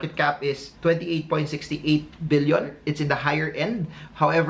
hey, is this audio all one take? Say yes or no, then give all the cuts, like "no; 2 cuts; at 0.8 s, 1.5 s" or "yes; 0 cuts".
no; 1 cut; at 2.8 s